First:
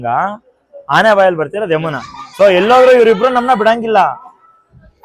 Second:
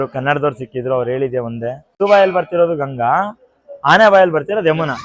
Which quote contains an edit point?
second; 1 cut; at 2.0 s

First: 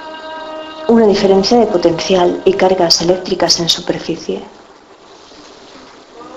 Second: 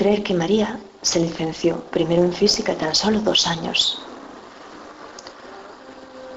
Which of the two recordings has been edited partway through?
first; 1 cut; at 2.9 s

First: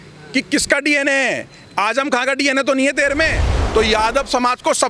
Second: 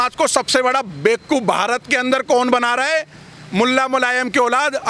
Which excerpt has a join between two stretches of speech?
first; 1 cut; at 3.5 s

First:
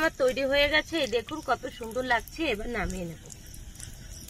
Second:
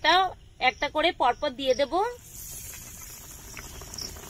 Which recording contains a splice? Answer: second; 1 cut; at 3.3 s

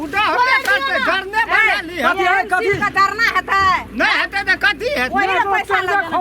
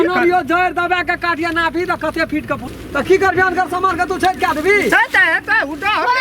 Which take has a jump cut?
second; 1 cut; at 2.7 s

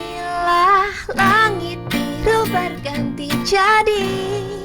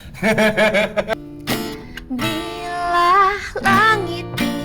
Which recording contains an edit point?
second; 1 cut; at 1.1 s

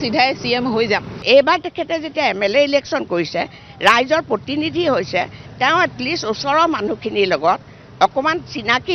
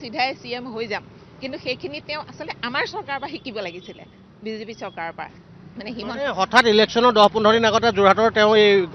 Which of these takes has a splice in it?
first; 1 cut; at 1.2 s

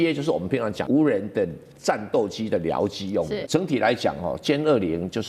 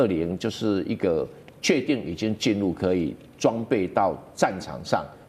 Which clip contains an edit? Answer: first; 2 cuts; at 0.8 s, 3.4 s

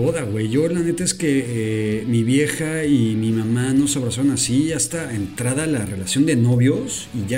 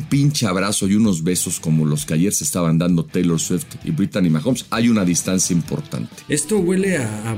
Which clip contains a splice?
second; 1 cut; at 6.1 s

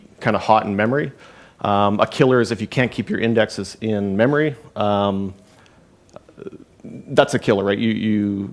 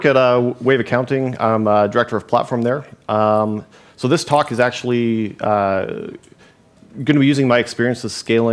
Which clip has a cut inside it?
first; 1 cut; at 7.4 s

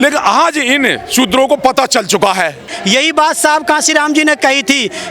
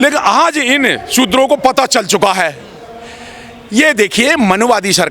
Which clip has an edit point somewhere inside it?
first; 1 cut; at 2.7 s

